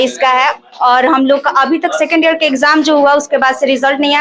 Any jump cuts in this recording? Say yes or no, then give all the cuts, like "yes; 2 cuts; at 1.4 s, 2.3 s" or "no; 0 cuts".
no; 0 cuts